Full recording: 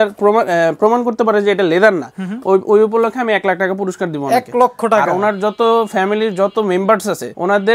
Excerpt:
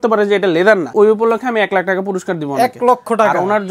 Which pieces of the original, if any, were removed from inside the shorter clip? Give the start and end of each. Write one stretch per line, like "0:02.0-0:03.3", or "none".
0:02.1-0:02.6